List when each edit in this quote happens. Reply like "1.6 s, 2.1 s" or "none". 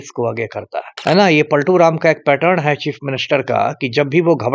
0.9 s